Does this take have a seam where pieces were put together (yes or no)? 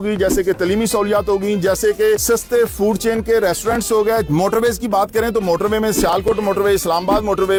no